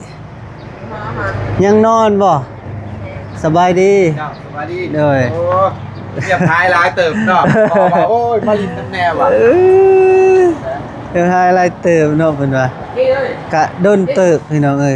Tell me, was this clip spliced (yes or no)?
no